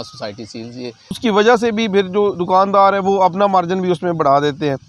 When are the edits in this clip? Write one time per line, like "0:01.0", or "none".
0:01.2